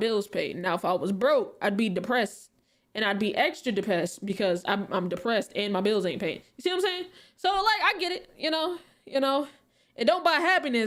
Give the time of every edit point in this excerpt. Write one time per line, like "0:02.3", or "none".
none

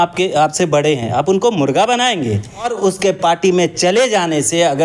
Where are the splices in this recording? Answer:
0:02.7

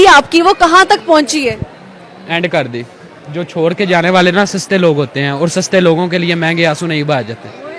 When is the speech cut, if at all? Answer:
none

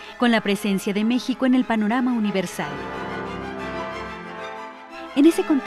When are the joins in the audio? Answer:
none

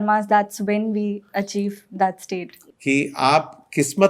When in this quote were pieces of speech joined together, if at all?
0:02.6

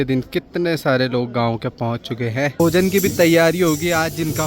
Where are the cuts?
0:02.6

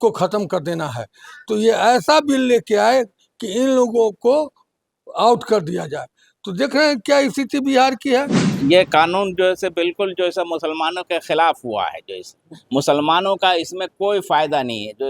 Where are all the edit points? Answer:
0:08.4

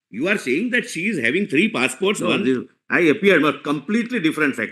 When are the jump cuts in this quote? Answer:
0:02.2

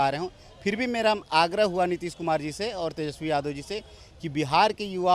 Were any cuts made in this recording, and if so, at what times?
none

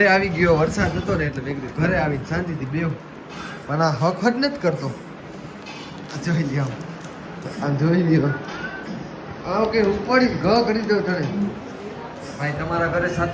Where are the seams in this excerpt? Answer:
0:08.8
0:11.3

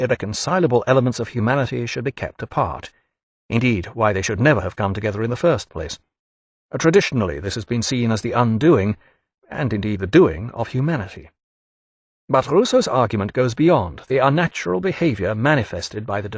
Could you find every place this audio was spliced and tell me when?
0:04.6

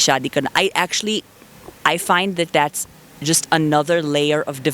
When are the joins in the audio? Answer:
none

